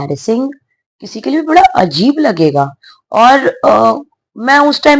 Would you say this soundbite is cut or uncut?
uncut